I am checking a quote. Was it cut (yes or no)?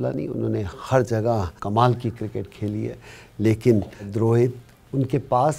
yes